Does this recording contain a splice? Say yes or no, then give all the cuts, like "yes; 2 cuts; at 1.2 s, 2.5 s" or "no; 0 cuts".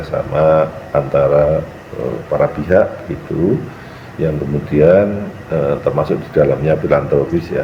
no; 0 cuts